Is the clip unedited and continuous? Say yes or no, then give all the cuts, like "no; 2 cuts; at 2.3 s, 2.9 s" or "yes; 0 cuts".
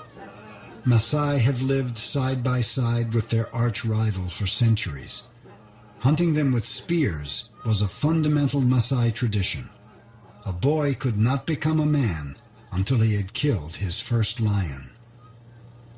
yes; 0 cuts